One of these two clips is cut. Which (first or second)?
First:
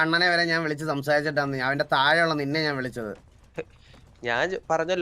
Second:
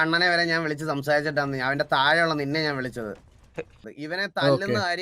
second